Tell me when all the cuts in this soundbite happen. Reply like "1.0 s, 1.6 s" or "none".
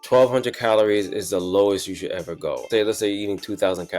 2.6 s